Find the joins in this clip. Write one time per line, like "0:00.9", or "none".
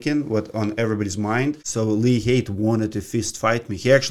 0:01.7